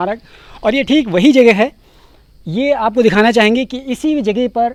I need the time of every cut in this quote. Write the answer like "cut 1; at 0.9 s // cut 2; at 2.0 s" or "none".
none